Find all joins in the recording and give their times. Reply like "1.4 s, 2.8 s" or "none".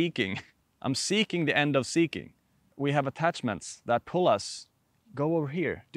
2.8 s